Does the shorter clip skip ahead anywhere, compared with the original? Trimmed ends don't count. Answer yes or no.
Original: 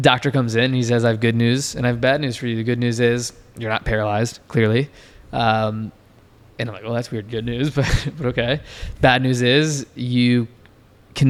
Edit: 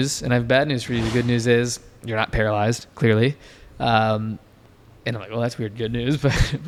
no